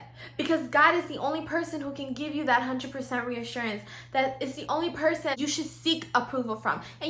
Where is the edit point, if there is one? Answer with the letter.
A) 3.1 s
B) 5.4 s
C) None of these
B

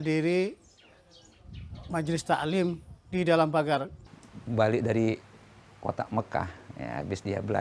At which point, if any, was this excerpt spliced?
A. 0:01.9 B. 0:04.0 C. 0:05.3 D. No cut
B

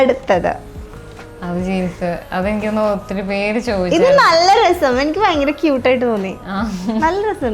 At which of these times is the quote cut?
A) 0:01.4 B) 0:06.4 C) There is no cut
C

